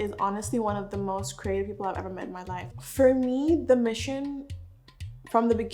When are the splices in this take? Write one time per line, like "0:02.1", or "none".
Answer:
0:02.7

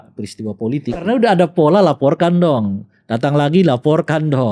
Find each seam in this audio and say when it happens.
0:01.1

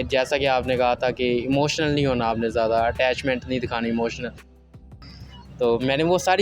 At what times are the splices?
0:04.8

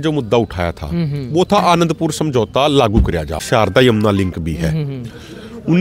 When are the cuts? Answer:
0:03.4

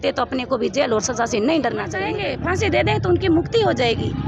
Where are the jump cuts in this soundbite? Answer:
0:02.1

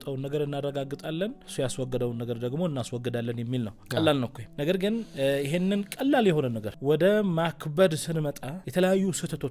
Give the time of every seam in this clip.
0:01.4
0:04.9
0:06.7
0:08.5

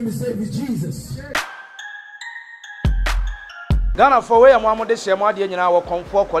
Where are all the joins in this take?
0:01.2

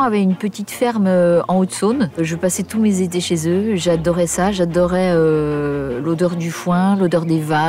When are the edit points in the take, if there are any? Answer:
0:02.2

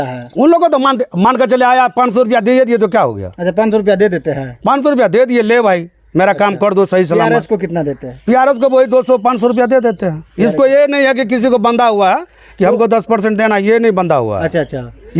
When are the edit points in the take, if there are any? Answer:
none

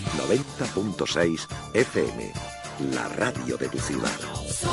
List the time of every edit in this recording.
none

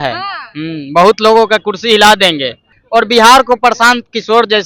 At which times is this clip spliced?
0:02.8

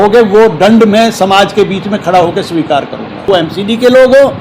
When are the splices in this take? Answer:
0:03.3

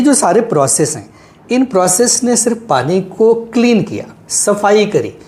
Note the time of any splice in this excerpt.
none

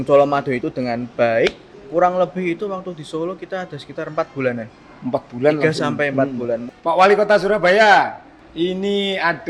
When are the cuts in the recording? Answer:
0:01.7
0:06.6

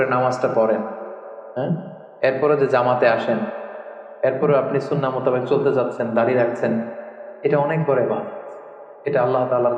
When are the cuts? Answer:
none

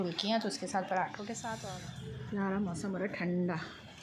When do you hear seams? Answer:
0:01.6

